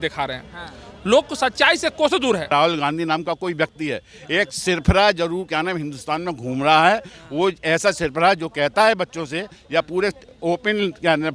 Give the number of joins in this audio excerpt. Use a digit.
1